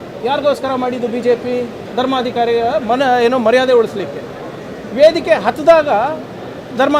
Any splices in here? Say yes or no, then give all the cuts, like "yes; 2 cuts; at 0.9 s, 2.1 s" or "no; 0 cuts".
yes; 1 cut; at 1.8 s